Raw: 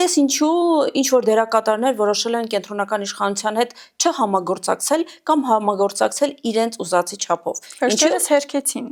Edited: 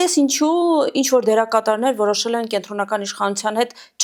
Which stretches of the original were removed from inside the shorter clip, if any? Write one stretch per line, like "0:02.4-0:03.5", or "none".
none